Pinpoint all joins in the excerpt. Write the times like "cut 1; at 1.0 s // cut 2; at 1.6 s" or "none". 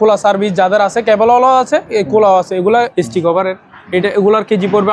cut 1; at 2.9 s